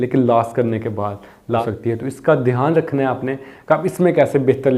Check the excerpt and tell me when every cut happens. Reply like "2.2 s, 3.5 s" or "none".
1.6 s